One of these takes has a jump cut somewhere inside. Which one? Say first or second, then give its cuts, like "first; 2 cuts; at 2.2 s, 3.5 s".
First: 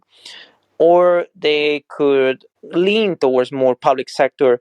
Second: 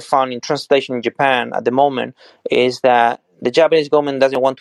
first; 1 cut; at 2.5 s